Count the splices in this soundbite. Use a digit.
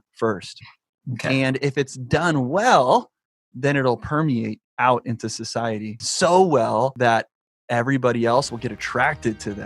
4